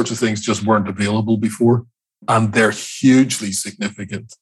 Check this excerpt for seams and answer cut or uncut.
cut